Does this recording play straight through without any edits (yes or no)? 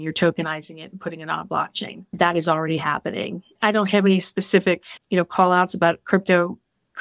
no